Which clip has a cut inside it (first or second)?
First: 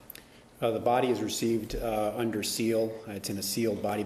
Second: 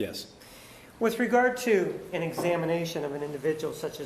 second